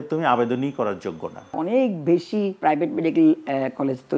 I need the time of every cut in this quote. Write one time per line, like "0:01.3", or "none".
0:01.6
0:02.6